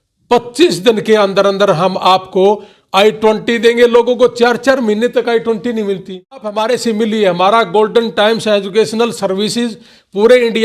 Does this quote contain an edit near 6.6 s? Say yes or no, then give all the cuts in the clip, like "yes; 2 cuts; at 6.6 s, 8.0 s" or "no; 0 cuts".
yes; 1 cut; at 6.6 s